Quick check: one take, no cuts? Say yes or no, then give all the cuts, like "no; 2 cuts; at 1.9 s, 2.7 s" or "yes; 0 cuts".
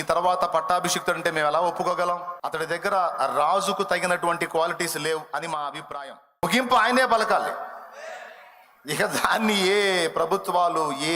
no; 2 cuts; at 2.4 s, 6.4 s